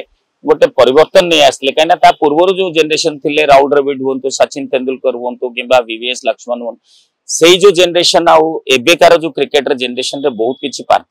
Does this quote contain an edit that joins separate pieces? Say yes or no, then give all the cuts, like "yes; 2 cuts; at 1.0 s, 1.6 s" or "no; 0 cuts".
no; 0 cuts